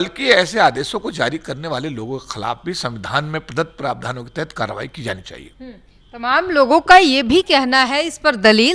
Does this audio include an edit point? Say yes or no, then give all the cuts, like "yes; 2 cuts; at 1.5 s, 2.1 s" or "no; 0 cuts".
no; 0 cuts